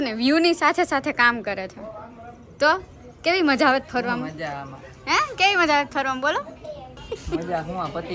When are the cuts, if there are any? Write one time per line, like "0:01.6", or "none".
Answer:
0:07.0